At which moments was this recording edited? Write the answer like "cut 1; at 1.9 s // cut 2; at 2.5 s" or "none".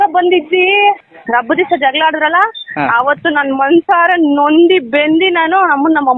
cut 1; at 1.1 s